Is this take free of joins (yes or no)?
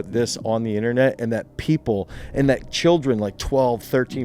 yes